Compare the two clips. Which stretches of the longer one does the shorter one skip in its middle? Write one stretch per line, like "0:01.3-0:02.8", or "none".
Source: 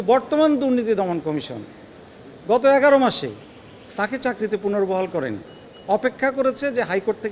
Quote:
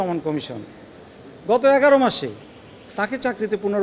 none

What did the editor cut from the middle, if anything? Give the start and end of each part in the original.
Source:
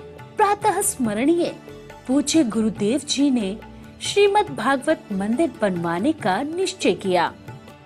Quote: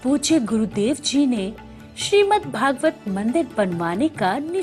none

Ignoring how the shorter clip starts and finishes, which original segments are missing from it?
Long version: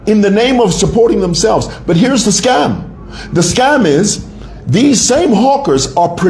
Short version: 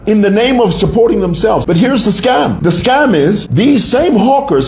0:01.6-0:01.8
0:02.8-0:03.3
0:04.2-0:04.6

